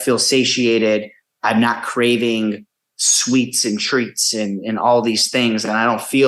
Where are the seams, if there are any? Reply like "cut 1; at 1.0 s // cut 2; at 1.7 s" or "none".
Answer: none